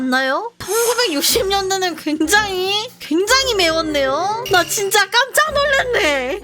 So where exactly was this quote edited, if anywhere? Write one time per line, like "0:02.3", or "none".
0:04.4